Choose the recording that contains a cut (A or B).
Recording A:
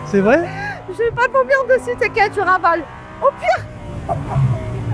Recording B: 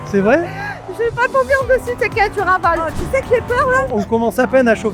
B